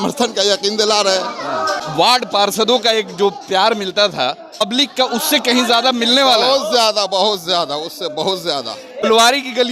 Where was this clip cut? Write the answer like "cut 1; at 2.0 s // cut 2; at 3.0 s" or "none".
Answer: cut 1; at 1.6 s // cut 2; at 4.6 s // cut 3; at 9.0 s

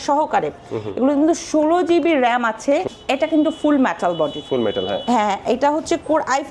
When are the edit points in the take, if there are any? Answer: cut 1; at 2.9 s

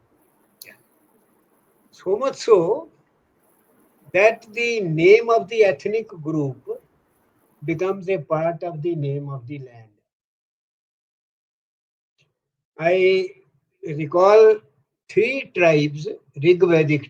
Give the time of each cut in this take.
none

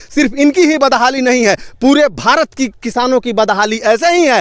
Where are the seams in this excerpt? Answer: none

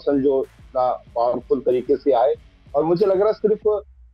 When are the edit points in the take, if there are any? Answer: none

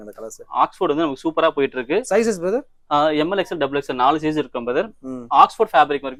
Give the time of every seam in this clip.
none

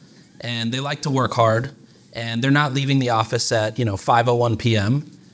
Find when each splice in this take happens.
none

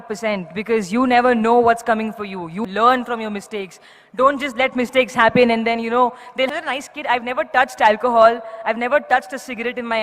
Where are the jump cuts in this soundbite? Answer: cut 1; at 2.6 s // cut 2; at 6.4 s

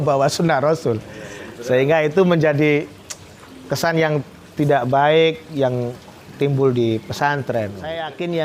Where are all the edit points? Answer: none

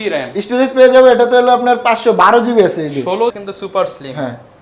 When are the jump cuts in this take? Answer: cut 1; at 3.4 s

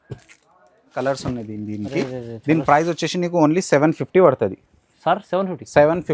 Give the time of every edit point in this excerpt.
cut 1; at 0.9 s

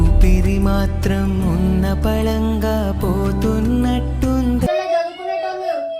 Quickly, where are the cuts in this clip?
cut 1; at 4.7 s

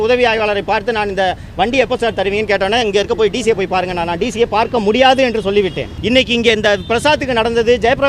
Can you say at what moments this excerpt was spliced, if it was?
cut 1; at 5.9 s

